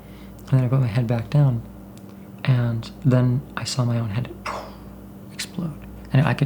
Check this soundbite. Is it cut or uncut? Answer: uncut